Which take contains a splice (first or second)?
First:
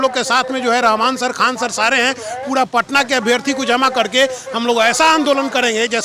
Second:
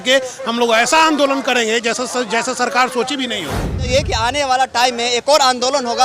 second